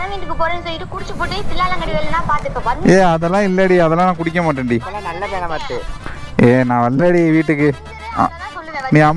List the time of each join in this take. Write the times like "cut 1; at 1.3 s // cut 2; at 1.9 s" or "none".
none